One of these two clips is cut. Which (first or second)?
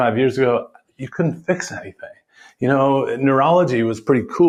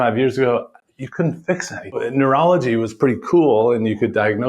second